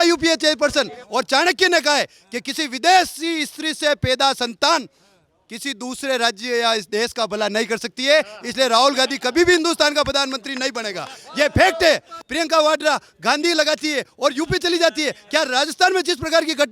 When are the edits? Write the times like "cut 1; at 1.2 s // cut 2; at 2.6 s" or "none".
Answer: cut 1; at 1.0 s // cut 2; at 12.2 s